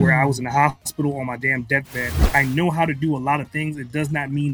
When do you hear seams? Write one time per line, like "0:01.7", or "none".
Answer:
0:02.2